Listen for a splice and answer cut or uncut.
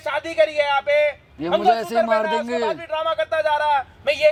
uncut